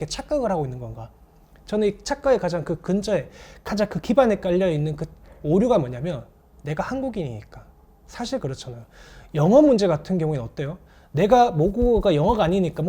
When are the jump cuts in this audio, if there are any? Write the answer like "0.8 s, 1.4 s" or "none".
none